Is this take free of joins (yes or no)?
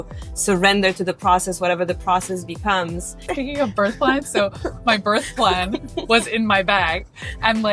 no